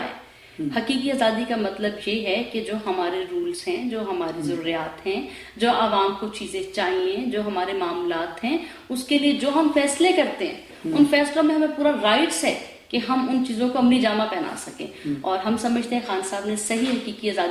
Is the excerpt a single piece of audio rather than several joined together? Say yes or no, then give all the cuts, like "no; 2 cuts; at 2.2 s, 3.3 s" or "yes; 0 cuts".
yes; 0 cuts